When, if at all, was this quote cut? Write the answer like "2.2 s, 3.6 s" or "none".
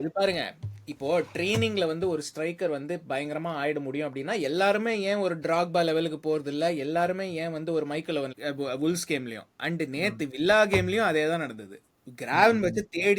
8.3 s